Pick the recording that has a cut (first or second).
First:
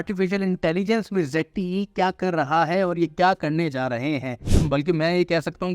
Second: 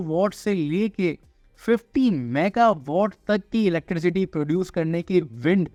first